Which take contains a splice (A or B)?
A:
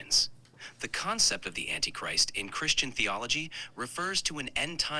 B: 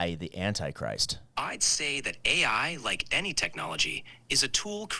B